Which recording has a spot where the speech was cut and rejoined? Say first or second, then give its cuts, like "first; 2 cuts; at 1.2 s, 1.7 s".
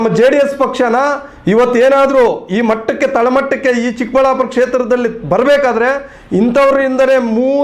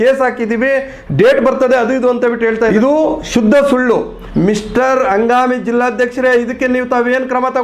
second; 2 cuts; at 2.7 s, 4.2 s